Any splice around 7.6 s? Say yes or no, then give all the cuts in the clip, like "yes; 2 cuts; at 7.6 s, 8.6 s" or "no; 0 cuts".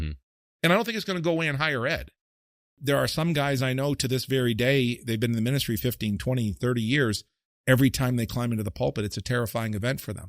no; 1 cut; at 2.7 s